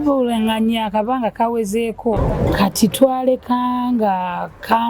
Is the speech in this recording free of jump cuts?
no; 1 cut; at 2.2 s

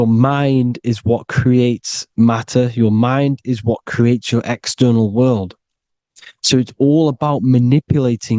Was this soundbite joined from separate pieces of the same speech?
no; 0 cuts

